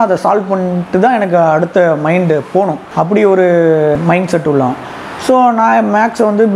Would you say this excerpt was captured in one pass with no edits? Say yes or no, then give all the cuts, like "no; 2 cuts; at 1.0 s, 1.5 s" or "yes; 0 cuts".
yes; 0 cuts